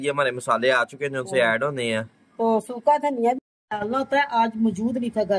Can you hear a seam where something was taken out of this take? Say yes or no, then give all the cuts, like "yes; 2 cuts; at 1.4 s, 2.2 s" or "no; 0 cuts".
yes; 1 cut; at 3.4 s